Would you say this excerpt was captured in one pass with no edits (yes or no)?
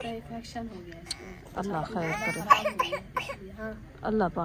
yes